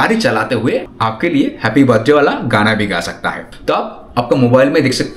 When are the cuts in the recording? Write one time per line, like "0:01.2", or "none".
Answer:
0:00.9
0:03.5